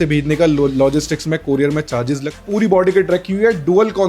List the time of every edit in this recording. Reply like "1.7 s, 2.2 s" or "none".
2.4 s